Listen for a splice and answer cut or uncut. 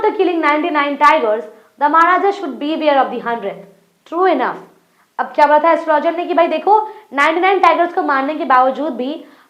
uncut